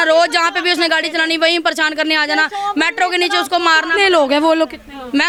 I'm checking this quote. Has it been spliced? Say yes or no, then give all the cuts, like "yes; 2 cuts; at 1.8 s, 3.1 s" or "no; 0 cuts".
no; 0 cuts